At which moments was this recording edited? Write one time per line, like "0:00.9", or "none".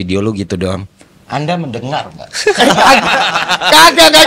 none